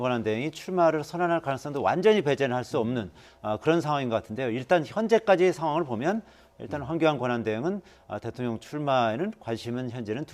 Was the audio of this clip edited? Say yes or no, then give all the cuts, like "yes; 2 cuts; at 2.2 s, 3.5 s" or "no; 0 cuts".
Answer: yes; 1 cut; at 6.0 s